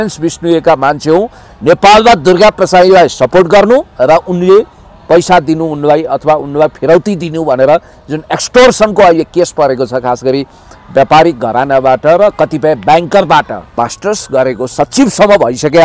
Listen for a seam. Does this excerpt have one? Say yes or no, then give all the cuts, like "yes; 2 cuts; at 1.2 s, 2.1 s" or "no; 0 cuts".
yes; 1 cut; at 13.8 s